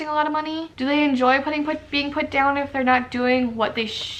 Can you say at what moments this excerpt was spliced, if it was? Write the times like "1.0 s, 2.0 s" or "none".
none